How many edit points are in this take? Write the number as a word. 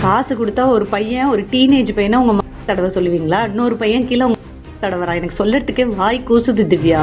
zero